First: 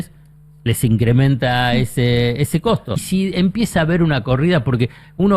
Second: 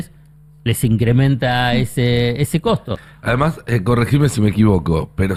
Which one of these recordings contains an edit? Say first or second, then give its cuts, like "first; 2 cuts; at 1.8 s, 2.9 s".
first; 1 cut; at 3.0 s